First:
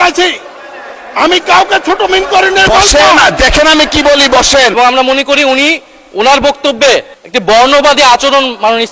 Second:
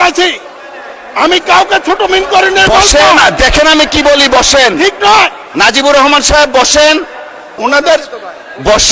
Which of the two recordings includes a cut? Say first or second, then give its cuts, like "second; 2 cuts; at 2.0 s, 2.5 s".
first; 2 cuts; at 4.8 s, 7.7 s